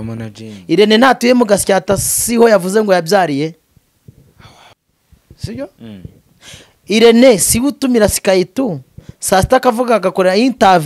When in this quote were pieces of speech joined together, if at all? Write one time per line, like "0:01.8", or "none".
none

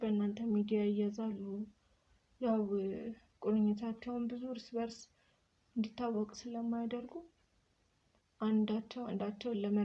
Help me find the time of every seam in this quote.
none

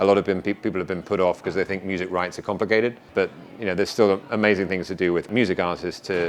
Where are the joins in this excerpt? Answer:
0:03.0
0:05.3

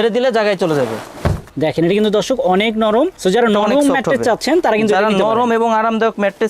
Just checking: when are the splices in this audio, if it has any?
0:01.5

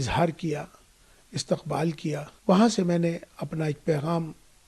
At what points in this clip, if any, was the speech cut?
0:02.3

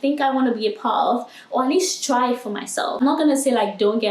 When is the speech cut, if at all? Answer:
0:03.0

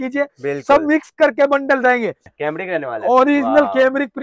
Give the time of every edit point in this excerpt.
0:02.3

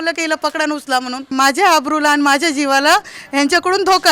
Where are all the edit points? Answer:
0:01.3

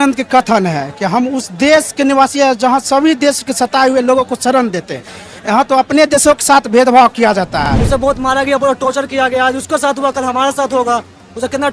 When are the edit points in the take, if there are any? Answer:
0:07.7

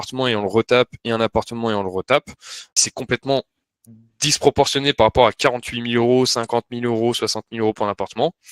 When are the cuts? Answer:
0:02.7

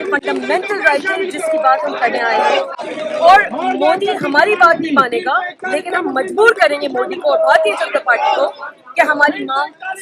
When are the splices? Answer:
none

